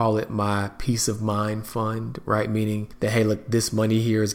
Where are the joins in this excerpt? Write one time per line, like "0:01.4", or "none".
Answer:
0:02.9

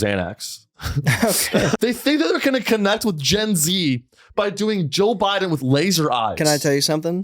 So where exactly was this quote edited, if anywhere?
0:01.8

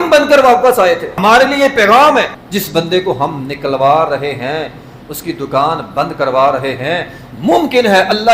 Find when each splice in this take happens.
0:01.1
0:02.4

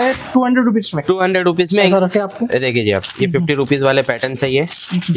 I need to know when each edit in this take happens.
0:01.9

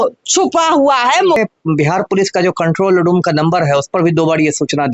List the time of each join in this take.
0:01.4

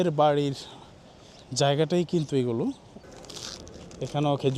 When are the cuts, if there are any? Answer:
0:02.9

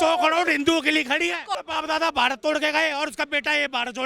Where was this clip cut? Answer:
0:01.5

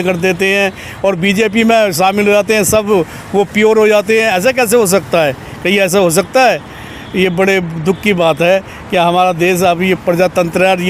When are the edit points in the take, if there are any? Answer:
none

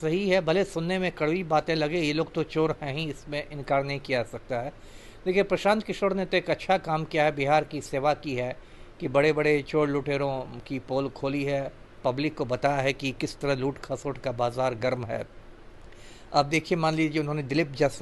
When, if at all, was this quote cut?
none

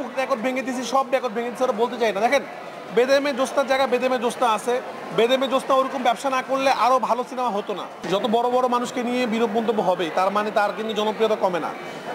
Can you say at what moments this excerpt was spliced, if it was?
0:07.9

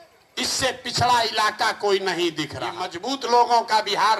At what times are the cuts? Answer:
0:03.2

